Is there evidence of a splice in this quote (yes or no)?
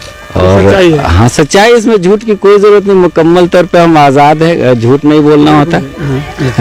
no